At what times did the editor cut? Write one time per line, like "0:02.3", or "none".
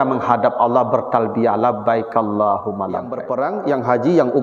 0:03.2